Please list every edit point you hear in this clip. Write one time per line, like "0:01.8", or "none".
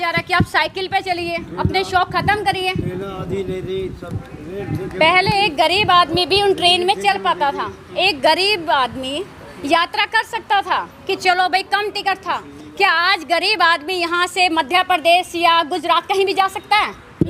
none